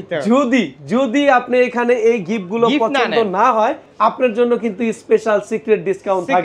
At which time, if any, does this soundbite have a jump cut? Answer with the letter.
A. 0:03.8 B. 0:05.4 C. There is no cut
A